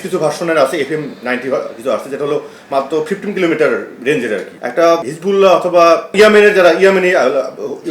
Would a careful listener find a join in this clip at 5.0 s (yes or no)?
yes